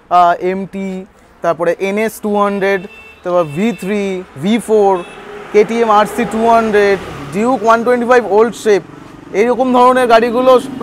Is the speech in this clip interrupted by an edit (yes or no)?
no